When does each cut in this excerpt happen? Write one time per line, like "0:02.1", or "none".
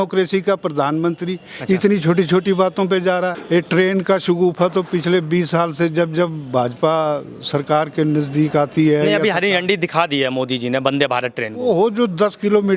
0:03.4